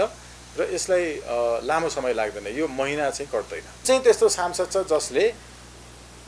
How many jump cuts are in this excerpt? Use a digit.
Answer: 1